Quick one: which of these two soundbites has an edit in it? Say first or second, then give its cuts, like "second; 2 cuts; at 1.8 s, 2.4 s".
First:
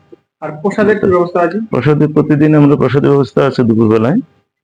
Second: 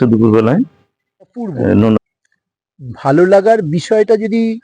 second; 1 cut; at 2.0 s